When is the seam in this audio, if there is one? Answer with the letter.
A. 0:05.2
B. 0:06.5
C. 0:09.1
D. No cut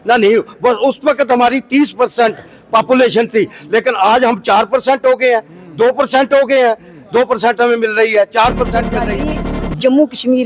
C